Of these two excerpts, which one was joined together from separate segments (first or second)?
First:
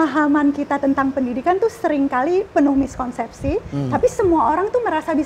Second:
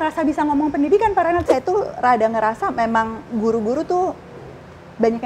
second